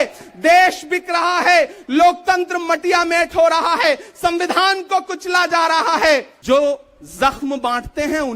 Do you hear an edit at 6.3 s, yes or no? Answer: yes